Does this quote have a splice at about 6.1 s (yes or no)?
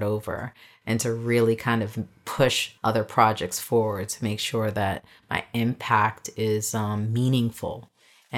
no